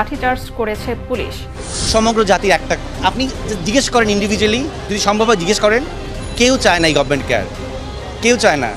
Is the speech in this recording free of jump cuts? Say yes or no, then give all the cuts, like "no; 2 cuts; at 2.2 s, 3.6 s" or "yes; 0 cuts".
yes; 0 cuts